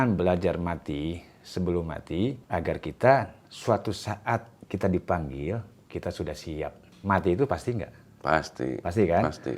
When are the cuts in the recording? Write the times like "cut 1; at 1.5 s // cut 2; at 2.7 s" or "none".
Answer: cut 1; at 2.4 s // cut 2; at 4.6 s // cut 3; at 5.8 s // cut 4; at 6.9 s